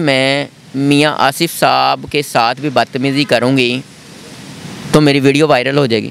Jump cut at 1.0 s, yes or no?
no